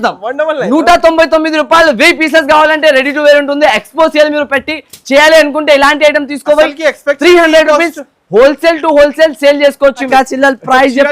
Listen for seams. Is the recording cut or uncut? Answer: cut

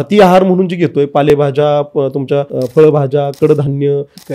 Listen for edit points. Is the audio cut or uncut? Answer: cut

